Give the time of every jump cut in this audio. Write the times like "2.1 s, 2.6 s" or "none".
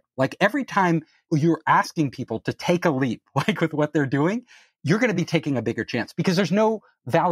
1.2 s, 4.7 s